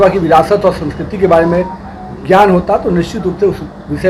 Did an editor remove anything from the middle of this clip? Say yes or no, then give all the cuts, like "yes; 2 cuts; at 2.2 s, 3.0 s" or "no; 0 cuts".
no; 0 cuts